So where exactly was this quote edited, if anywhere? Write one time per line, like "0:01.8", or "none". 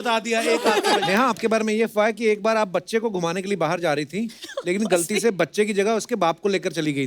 0:01.0

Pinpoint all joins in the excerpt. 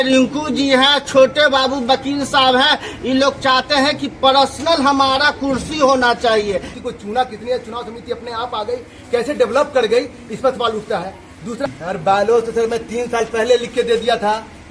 0:06.7
0:11.6

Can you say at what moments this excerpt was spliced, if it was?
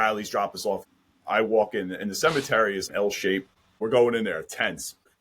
0:00.9
0:03.5

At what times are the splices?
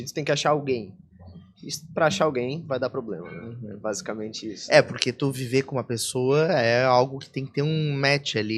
none

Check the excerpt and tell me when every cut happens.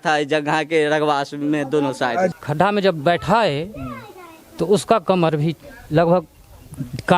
0:02.4

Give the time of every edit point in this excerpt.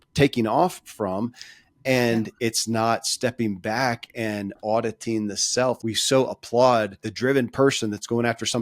0:05.8
0:07.0

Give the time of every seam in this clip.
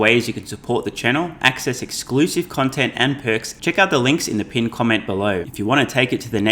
0:03.5
0:05.5

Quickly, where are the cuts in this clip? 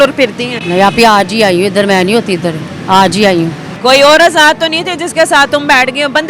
0:03.7

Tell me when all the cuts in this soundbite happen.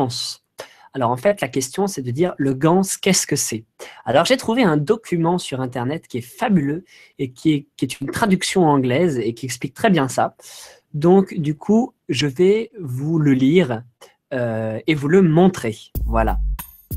0:09.7

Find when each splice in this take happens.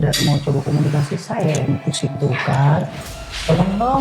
none

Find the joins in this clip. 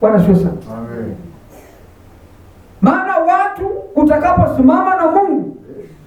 none

